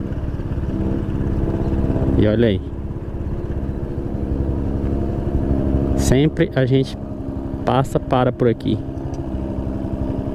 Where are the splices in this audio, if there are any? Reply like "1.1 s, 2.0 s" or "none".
none